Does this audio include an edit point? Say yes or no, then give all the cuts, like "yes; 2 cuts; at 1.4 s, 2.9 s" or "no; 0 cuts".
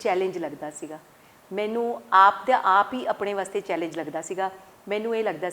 no; 0 cuts